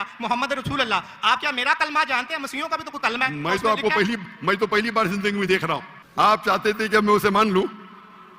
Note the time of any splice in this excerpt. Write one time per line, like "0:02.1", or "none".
0:06.0